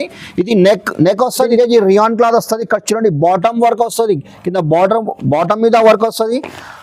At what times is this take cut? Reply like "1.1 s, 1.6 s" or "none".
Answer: 1.5 s